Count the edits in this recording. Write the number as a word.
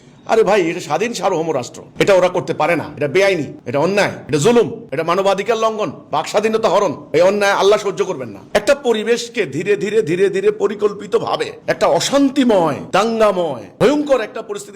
one